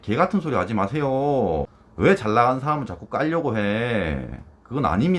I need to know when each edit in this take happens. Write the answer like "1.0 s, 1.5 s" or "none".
1.8 s